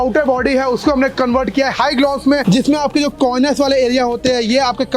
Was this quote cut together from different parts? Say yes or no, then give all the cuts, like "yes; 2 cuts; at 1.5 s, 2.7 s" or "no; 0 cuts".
no; 0 cuts